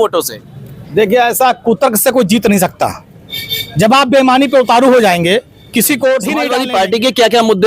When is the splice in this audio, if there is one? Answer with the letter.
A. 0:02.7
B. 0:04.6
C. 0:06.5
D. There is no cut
C